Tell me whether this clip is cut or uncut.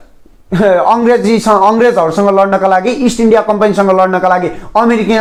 uncut